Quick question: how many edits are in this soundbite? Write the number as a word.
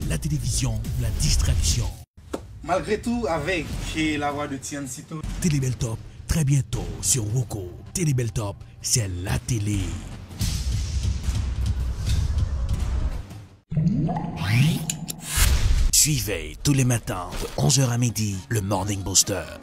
one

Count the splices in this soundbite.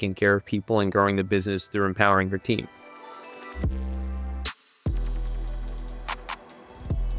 one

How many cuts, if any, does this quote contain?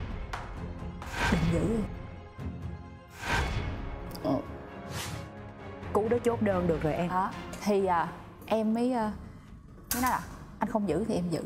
zero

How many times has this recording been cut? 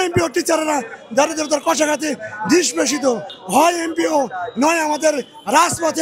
one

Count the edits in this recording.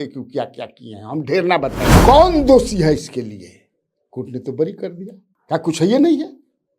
one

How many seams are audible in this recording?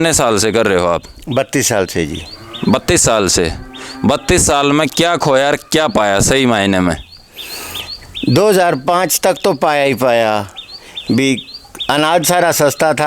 zero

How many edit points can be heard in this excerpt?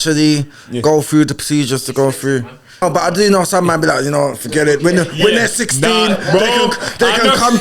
one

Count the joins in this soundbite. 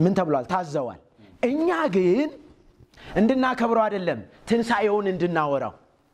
zero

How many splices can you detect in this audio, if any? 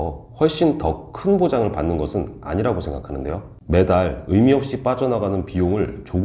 one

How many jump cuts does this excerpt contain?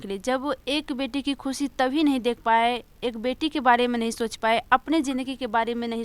zero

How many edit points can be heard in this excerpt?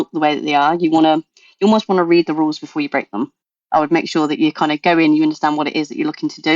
one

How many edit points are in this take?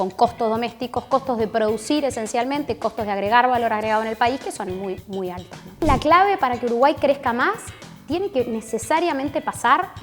one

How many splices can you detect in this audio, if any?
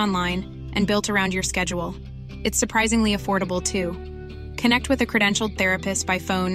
zero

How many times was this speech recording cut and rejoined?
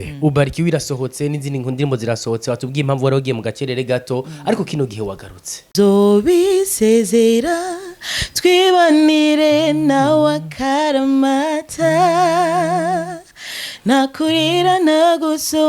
one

